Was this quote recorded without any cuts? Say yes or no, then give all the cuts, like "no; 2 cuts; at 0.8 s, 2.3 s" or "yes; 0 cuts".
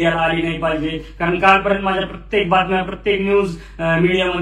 yes; 0 cuts